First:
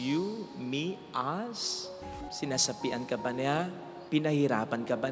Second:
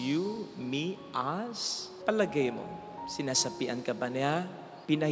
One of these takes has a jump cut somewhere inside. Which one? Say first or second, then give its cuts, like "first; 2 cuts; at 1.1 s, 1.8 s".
first; 1 cut; at 1.9 s